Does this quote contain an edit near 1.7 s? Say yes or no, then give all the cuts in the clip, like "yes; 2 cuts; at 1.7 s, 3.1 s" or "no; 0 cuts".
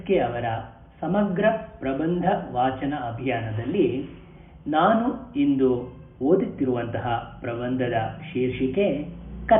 yes; 1 cut; at 1.7 s